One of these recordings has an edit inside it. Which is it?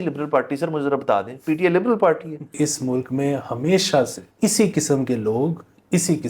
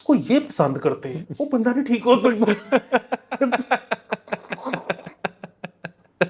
first; 2 cuts; at 2.5 s, 4.2 s

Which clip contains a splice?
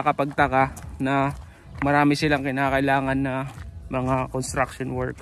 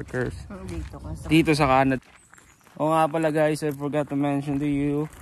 second; 1 cut; at 2.2 s

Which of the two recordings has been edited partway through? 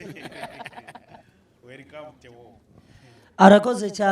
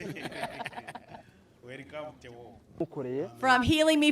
second; 1 cut; at 2.9 s

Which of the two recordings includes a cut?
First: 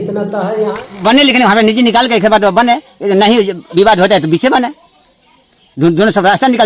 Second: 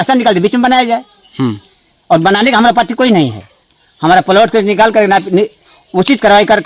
first; 1 cut; at 1.0 s

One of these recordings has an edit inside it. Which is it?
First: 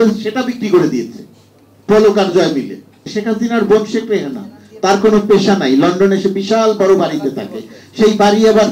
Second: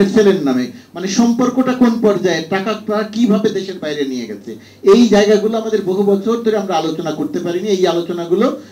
first; 1 cut; at 3.1 s

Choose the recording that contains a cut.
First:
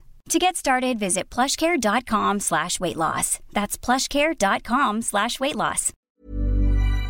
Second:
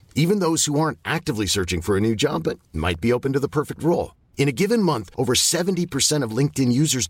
first; 1 cut; at 6.1 s

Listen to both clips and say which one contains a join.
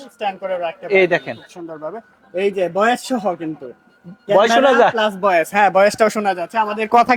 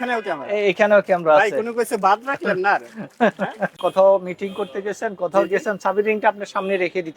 second; 1 cut; at 3.8 s

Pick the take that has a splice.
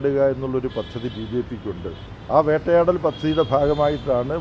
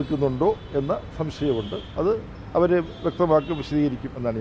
first; 1 cut; at 2.1 s

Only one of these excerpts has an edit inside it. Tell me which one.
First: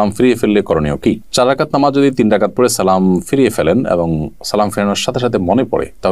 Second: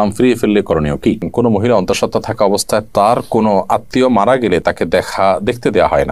second; 1 cut; at 1.3 s

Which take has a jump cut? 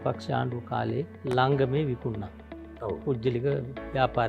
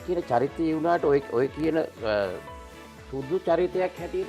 first; 1 cut; at 1.2 s

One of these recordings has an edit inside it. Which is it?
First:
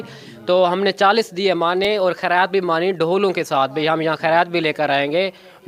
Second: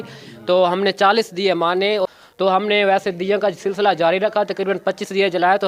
second; 1 cut; at 2.0 s

